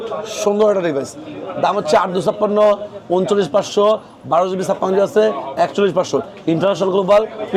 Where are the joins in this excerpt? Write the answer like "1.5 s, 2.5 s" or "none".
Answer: none